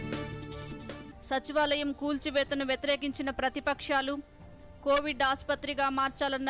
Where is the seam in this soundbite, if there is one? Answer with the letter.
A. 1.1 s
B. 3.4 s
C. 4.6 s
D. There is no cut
A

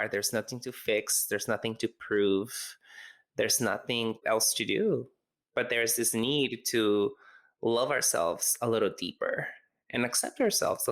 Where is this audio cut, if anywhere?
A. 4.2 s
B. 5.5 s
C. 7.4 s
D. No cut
A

